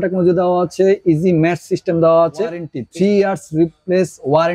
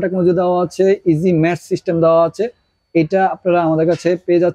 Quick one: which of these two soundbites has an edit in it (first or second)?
first